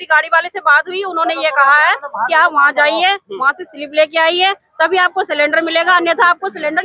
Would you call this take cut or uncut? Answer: uncut